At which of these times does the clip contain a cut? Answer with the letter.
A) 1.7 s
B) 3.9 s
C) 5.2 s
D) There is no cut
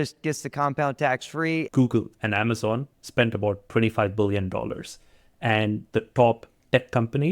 A